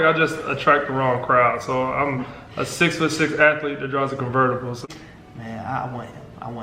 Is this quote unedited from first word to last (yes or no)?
no